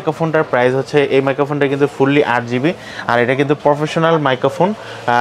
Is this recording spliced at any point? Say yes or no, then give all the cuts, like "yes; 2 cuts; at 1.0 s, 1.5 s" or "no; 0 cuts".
no; 0 cuts